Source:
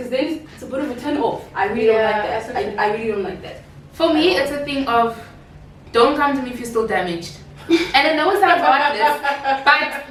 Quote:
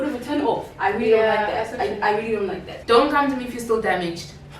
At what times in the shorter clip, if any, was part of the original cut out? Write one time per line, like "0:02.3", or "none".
0:02.7